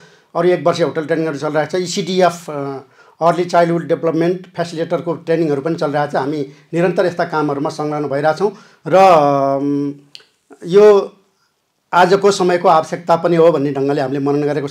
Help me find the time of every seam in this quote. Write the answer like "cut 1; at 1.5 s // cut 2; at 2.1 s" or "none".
none